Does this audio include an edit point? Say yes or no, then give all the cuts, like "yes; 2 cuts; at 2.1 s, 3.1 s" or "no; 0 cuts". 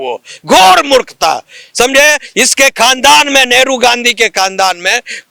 no; 0 cuts